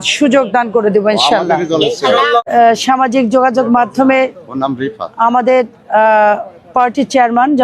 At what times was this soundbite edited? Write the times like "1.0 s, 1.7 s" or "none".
2.4 s